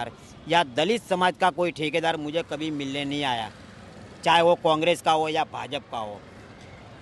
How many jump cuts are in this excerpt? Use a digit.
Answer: 0